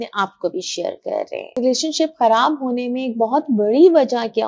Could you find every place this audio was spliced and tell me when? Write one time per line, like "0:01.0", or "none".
0:01.6